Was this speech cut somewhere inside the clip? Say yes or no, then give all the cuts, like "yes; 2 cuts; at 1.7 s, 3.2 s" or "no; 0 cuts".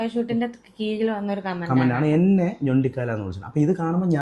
no; 0 cuts